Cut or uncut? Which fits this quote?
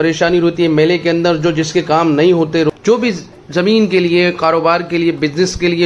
cut